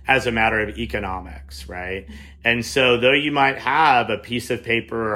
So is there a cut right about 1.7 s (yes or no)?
no